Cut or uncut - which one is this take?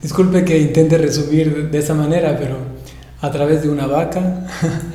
uncut